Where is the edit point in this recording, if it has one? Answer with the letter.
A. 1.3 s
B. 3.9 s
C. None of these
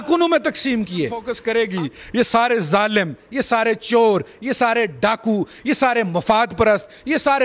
A